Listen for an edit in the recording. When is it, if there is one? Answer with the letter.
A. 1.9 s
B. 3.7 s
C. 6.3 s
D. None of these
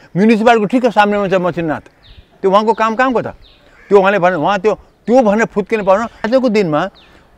C